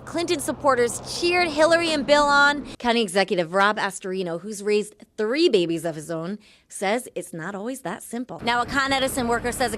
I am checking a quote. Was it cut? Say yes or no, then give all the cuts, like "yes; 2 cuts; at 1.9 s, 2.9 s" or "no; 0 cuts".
yes; 2 cuts; at 2.7 s, 8.3 s